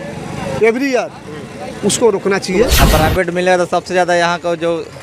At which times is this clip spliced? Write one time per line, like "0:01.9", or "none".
0:02.7